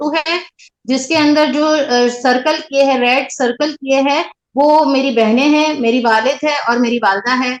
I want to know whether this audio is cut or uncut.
uncut